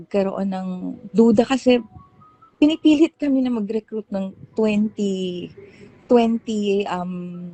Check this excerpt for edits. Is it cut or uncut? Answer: uncut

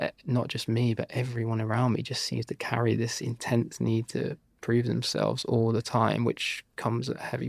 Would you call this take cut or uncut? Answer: uncut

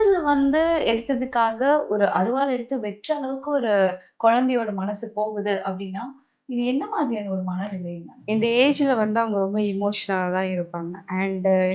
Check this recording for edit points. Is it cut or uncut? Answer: cut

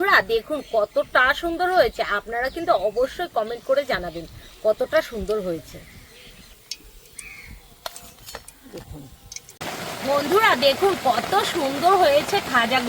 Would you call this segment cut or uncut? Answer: cut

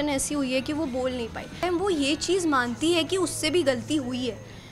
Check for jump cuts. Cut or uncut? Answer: cut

